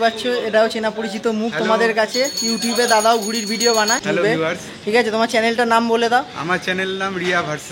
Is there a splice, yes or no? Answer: yes